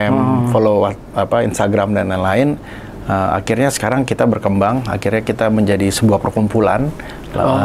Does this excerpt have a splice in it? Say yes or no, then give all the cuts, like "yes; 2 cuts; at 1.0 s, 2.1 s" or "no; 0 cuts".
no; 0 cuts